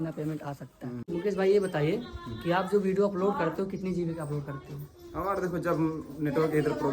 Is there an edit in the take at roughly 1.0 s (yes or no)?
yes